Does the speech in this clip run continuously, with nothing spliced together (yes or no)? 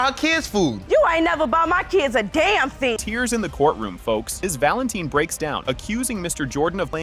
yes